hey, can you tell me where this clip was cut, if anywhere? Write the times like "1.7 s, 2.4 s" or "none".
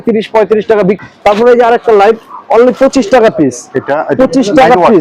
1.0 s